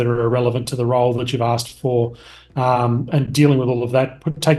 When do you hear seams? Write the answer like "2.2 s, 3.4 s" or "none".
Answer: none